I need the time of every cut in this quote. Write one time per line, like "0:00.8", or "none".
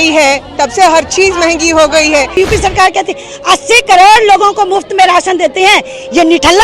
0:02.3

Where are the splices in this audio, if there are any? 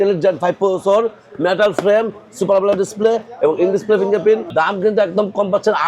0:04.5

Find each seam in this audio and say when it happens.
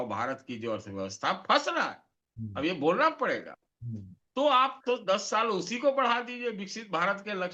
none

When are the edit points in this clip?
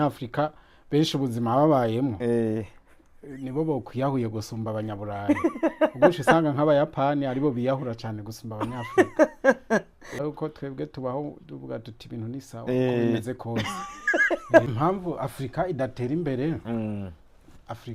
0:10.3
0:14.7

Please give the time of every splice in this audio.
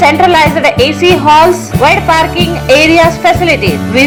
none

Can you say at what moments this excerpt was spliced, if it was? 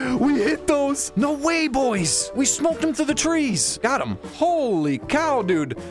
0:01.0
0:02.2
0:03.7

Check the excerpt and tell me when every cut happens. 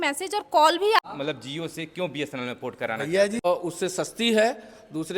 0:01.0
0:03.5

